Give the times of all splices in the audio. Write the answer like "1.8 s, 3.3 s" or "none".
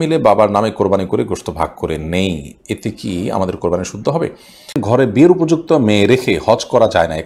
4.8 s

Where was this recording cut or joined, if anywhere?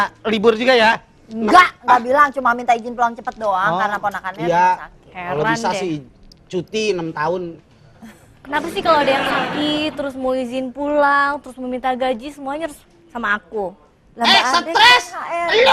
none

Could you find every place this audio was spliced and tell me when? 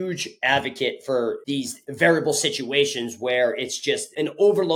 1.4 s

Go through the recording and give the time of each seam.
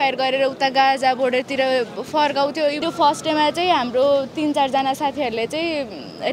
2.8 s

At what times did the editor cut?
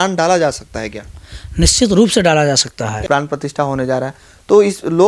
3.0 s

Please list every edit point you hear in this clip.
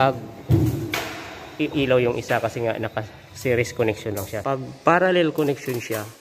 4.3 s

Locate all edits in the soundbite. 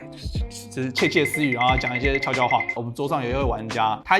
2.7 s

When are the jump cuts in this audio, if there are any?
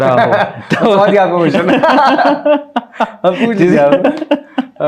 none

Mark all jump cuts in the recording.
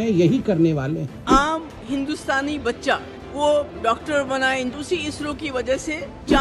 1.1 s, 4.7 s

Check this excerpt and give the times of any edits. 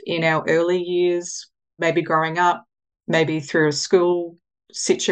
1.8 s

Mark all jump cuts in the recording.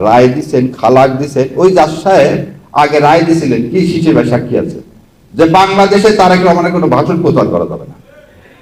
none

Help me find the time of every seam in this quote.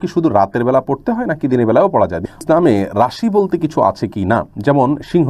2.4 s

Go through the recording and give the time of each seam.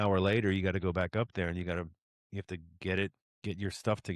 3.3 s

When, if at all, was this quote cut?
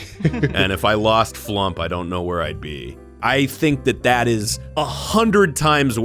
3.1 s

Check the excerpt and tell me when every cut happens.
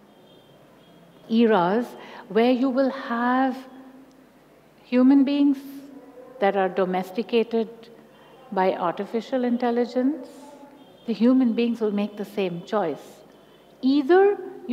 10.8 s

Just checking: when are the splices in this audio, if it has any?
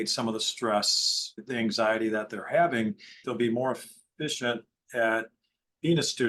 3.2 s

